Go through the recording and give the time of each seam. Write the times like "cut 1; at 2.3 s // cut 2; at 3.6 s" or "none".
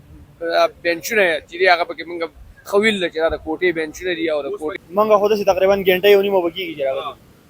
cut 1; at 4.7 s